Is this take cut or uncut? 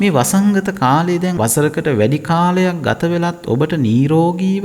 cut